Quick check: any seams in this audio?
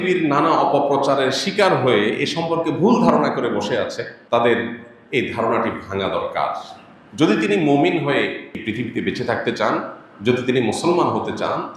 yes; 2 cuts; at 4.1 s, 8.5 s

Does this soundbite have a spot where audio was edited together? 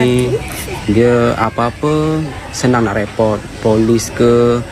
no; 0 cuts

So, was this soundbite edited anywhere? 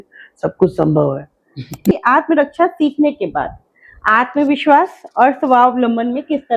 yes; 1 cut; at 1.9 s

